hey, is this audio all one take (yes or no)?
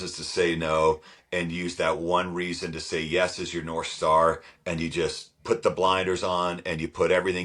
yes